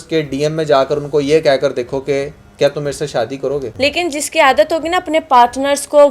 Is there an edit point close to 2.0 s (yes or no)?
no